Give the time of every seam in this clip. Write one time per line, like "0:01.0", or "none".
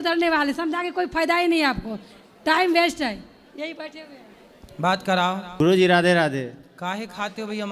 0:05.6